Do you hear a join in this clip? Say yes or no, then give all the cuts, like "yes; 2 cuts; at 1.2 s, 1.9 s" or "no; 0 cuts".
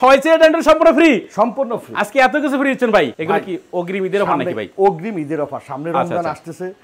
no; 0 cuts